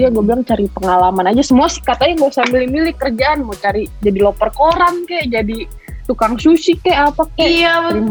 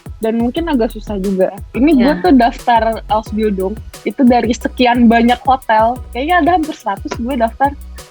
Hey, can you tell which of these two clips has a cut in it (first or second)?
second